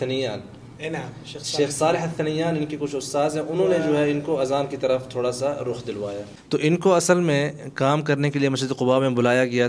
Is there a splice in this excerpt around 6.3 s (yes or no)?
yes